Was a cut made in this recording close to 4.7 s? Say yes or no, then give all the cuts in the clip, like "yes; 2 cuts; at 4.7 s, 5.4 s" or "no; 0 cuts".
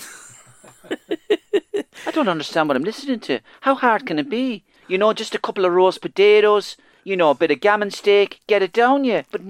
yes; 1 cut; at 4.7 s